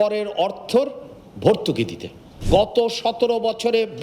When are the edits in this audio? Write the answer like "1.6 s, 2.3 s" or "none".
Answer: 2.3 s

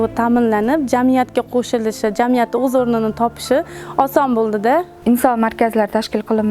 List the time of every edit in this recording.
4.7 s

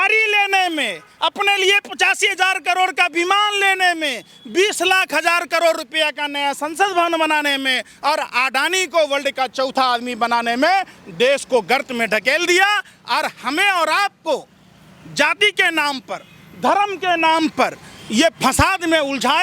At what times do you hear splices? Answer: none

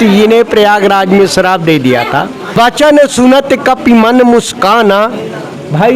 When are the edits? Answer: 2.4 s

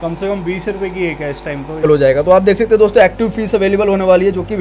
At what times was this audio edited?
1.9 s

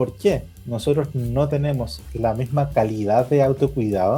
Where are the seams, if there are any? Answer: 2.1 s

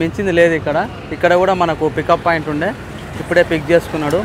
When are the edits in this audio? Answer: none

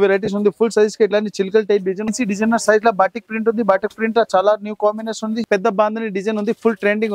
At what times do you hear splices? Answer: 2.1 s, 5.5 s

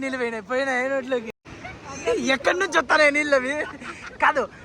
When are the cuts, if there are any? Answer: 1.3 s

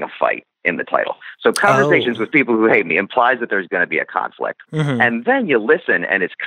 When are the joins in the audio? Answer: 2.3 s, 4.6 s

